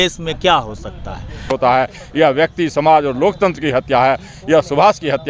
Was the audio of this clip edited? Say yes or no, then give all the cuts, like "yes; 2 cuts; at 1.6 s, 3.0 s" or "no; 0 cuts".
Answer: yes; 1 cut; at 1.5 s